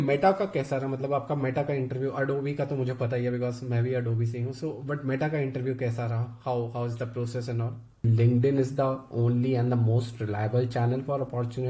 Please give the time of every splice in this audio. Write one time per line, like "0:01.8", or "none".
0:07.9